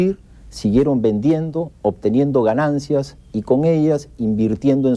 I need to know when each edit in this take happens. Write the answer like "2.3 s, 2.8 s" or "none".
none